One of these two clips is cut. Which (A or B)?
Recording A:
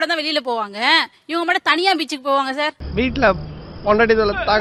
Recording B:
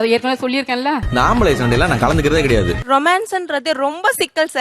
B